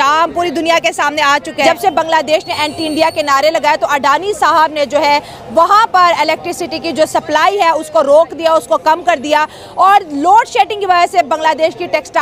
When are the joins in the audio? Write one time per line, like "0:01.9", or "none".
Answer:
0:01.6